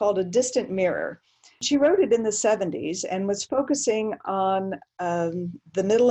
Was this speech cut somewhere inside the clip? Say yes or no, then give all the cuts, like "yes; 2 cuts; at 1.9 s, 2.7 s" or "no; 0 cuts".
yes; 1 cut; at 1.6 s